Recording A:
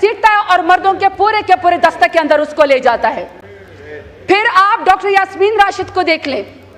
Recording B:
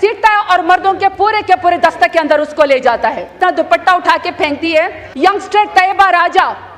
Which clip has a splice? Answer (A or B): B